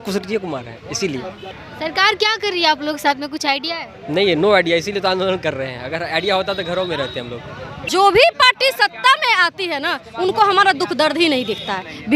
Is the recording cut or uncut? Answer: cut